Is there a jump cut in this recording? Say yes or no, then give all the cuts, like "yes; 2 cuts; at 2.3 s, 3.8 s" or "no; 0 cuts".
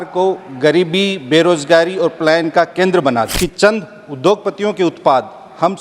yes; 1 cut; at 3.3 s